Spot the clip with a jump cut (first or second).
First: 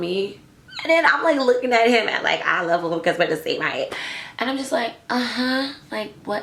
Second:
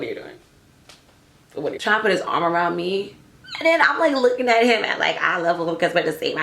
second